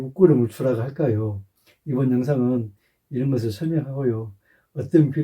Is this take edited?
no; 0 cuts

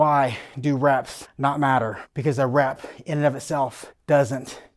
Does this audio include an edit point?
yes; 3 cuts; at 1.2 s, 2.1 s, 3.9 s

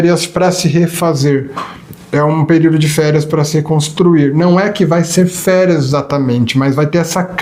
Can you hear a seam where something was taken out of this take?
no; 0 cuts

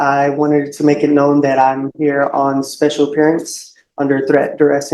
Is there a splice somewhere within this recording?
no; 0 cuts

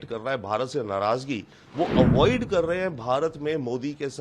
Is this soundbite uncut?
no; 1 cut; at 1.6 s

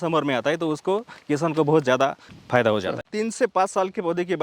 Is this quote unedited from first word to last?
no; 1 cut; at 3.1 s

